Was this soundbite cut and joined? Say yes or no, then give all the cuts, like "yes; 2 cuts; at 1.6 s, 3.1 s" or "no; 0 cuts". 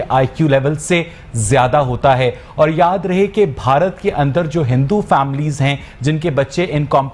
no; 0 cuts